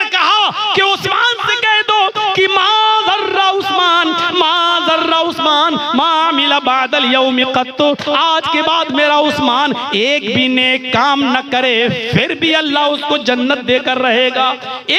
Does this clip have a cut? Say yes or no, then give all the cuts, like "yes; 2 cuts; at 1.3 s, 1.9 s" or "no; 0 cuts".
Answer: no; 0 cuts